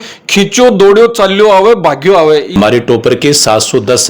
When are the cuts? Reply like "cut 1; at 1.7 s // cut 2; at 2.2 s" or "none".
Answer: cut 1; at 2.5 s